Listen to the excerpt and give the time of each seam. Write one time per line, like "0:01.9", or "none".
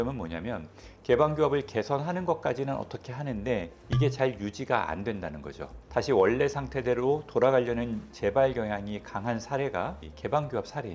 none